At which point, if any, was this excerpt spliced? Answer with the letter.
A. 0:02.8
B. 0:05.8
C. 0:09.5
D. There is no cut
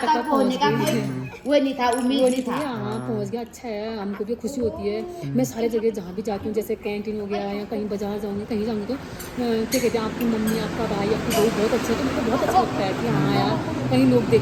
D